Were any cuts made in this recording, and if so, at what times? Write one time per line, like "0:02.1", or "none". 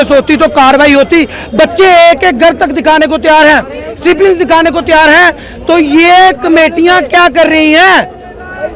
none